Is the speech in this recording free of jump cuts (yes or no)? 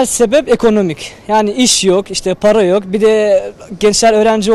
yes